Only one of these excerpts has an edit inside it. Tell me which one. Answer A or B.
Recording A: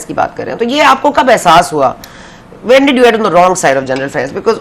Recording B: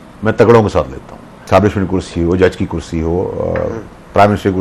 B